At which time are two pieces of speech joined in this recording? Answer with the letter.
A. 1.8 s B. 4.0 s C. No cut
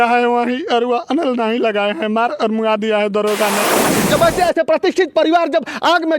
B